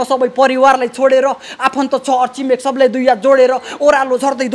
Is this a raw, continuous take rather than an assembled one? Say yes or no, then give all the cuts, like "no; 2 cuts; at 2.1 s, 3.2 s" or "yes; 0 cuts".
yes; 0 cuts